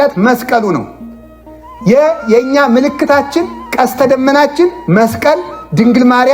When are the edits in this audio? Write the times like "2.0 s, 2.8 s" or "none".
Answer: none